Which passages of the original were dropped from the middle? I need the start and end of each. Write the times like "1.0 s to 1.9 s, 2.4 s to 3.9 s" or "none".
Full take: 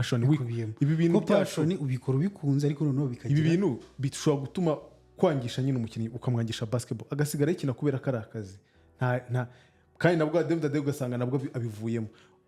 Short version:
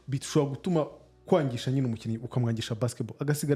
none

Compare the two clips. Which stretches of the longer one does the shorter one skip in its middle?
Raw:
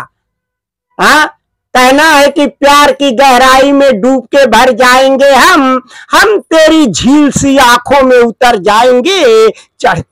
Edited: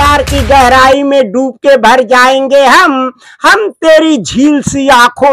none

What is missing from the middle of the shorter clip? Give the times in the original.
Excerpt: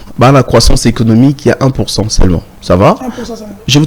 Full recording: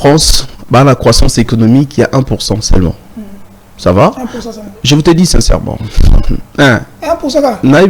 3.0 s to 3.7 s

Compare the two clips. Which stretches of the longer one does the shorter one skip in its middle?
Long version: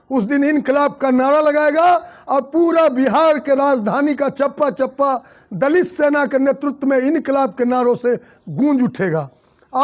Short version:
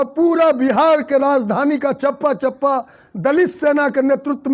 none

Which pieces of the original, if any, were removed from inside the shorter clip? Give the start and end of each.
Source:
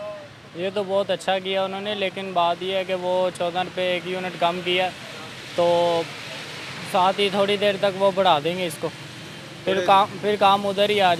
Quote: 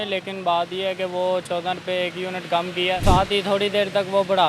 4.9 s to 6.9 s

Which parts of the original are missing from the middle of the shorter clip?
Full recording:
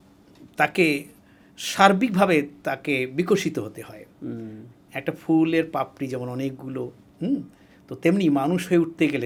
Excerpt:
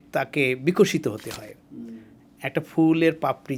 none

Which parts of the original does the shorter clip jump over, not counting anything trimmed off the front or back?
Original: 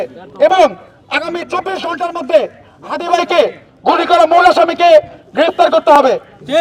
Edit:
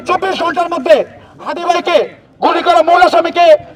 none

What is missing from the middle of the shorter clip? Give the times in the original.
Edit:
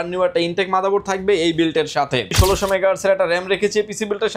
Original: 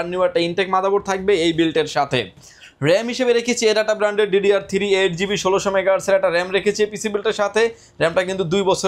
2.3 s to 5.4 s

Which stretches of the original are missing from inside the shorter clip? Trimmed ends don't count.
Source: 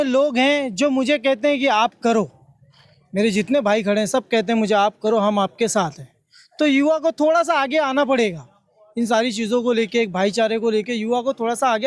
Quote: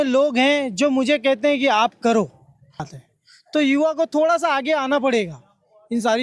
3.0 s to 6.0 s

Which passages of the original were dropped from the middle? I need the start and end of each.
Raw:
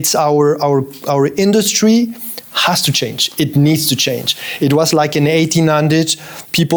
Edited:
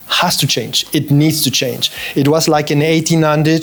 none

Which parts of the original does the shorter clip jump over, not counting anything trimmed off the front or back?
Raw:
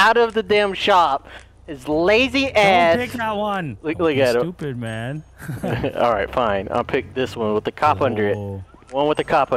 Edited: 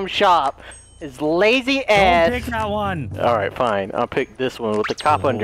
3.8 s to 5.9 s

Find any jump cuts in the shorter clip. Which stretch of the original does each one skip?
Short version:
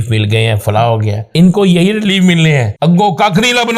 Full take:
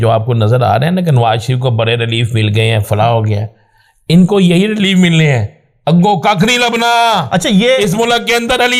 3.4 s to 3.9 s, 5.4 s to 5.7 s

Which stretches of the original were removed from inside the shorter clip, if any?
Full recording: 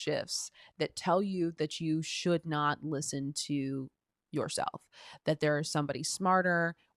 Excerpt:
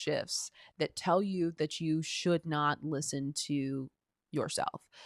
none

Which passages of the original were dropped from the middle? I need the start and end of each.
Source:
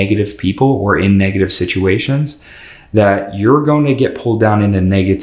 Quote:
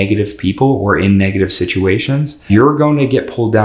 2.4 s to 3.3 s

